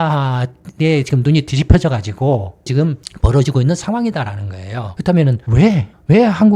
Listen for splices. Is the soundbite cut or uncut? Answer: cut